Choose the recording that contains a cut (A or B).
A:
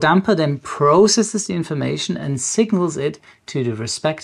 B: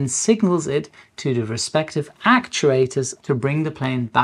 B